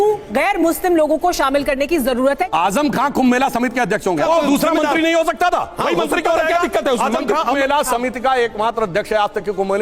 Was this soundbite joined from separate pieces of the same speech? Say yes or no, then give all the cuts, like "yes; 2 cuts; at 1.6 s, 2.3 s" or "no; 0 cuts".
yes; 3 cuts; at 2.5 s, 4.2 s, 7.6 s